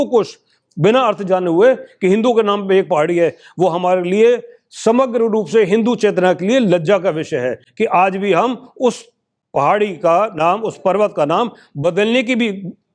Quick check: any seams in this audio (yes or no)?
no